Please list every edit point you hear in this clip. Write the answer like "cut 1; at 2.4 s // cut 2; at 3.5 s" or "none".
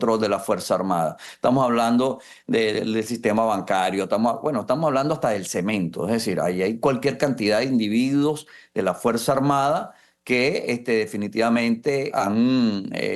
cut 1; at 12.1 s